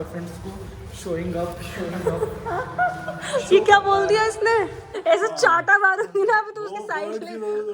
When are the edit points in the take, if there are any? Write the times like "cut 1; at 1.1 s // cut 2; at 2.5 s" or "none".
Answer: cut 1; at 1.6 s // cut 2; at 4.9 s